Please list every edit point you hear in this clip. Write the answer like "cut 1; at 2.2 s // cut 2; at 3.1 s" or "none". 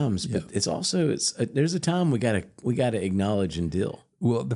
none